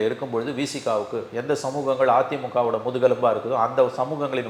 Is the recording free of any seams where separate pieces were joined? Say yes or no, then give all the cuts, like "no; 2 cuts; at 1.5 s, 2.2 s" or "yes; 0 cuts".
yes; 0 cuts